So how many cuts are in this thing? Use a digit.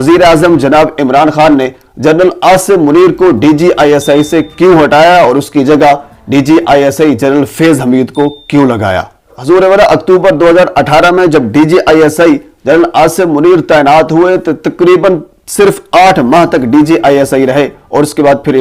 0